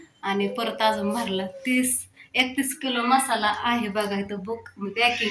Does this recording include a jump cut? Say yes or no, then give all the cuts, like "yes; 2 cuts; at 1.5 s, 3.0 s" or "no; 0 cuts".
no; 0 cuts